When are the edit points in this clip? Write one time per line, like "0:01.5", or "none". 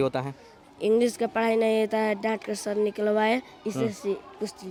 none